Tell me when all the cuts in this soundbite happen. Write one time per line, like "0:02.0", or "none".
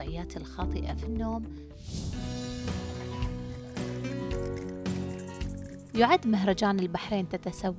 0:01.8